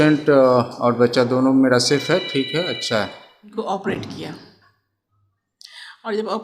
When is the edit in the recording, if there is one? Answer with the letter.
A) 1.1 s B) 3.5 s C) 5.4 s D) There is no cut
B